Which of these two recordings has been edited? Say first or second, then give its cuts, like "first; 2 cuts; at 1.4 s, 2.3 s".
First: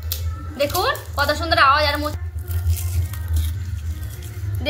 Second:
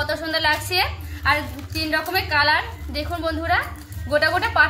first; 1 cut; at 2.2 s